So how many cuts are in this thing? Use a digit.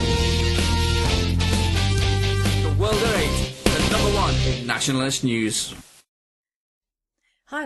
1